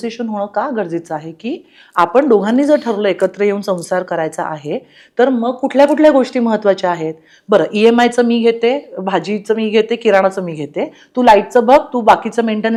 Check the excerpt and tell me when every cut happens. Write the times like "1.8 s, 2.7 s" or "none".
none